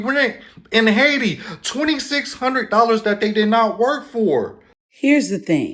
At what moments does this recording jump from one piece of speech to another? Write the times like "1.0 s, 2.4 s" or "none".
4.6 s